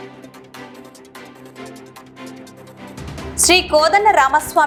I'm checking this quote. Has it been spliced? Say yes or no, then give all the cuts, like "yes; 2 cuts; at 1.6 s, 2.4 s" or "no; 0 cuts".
no; 0 cuts